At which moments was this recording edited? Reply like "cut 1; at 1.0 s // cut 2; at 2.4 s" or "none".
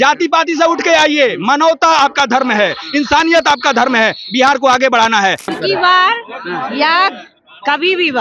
cut 1; at 5.5 s